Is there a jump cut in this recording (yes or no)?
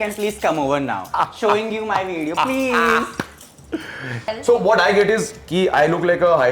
yes